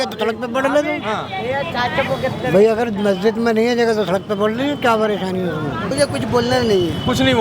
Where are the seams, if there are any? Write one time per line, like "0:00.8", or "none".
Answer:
0:05.9